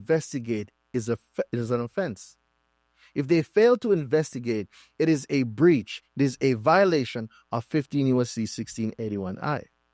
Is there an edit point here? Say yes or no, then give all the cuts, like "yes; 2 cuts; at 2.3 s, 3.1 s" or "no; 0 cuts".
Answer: no; 0 cuts